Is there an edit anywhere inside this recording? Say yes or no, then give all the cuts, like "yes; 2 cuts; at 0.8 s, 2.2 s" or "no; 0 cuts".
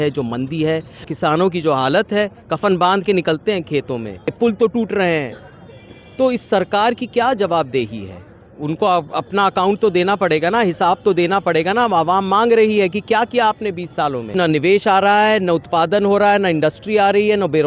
yes; 3 cuts; at 1.1 s, 4.3 s, 14.3 s